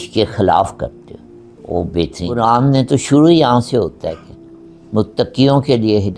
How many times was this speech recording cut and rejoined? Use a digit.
1